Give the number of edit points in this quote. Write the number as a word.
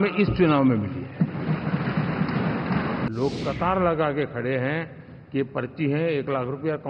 one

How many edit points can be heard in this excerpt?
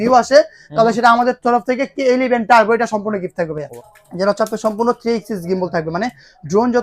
one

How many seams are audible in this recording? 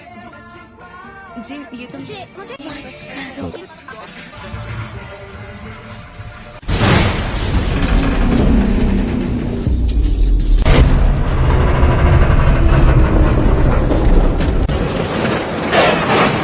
zero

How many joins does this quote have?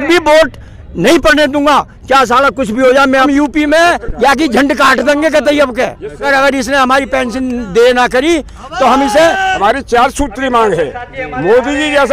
four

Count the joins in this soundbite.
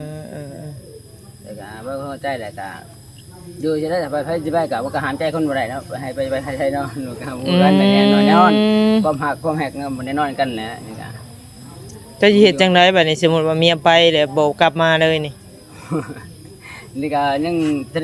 zero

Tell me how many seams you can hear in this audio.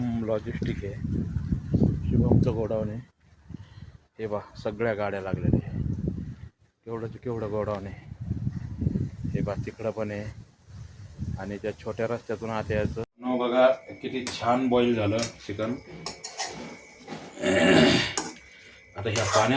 one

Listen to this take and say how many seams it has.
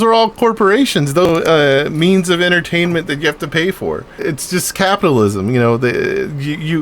two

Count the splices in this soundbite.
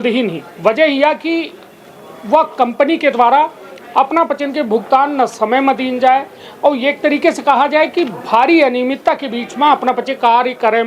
zero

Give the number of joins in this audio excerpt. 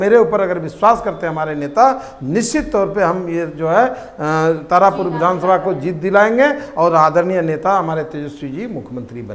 zero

